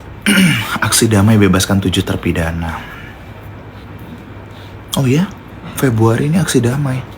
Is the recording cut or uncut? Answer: cut